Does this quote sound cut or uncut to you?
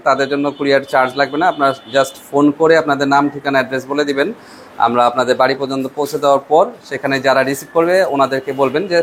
uncut